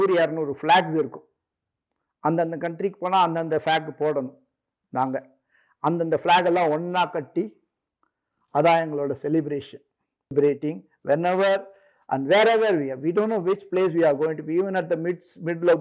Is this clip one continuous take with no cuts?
no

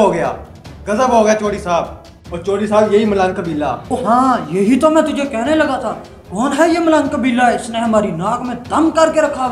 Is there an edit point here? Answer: no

